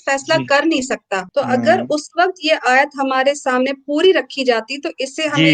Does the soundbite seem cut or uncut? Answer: cut